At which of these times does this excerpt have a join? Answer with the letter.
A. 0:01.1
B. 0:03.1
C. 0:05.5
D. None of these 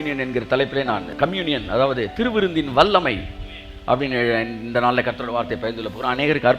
A